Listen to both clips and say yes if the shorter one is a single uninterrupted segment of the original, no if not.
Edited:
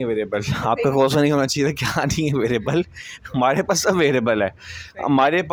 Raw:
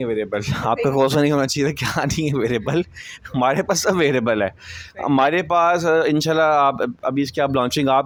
yes